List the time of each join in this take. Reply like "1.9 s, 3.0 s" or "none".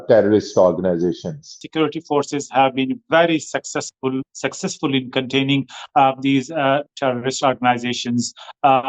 1.5 s

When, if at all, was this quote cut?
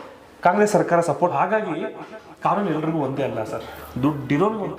1.3 s

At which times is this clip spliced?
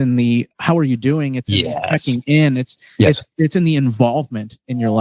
none

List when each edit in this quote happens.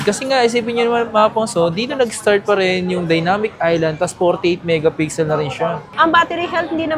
5.9 s

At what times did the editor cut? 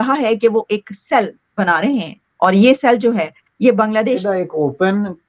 4.2 s

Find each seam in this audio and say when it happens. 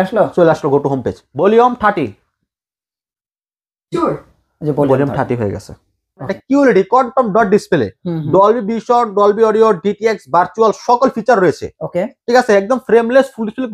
1.2 s, 6.0 s

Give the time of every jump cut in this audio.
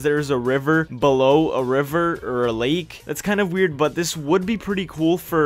none

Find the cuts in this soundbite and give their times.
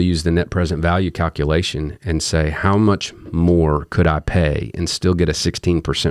none

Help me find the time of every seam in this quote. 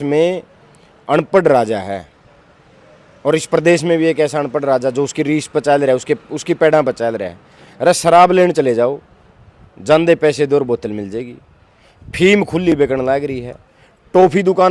none

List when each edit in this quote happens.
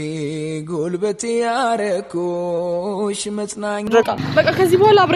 4.0 s

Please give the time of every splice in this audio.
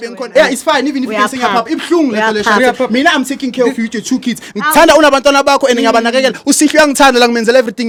none

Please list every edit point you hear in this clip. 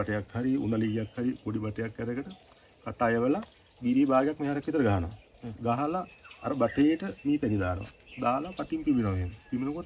none

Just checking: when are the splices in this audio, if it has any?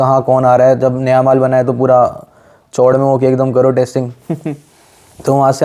none

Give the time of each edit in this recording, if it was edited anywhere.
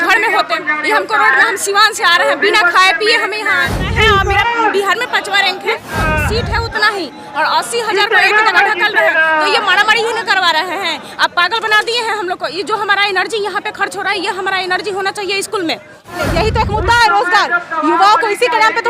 3.8 s, 5.8 s, 16.2 s

